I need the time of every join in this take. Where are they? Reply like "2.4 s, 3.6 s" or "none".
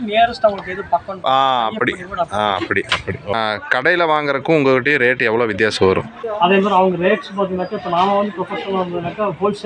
3.3 s, 6.2 s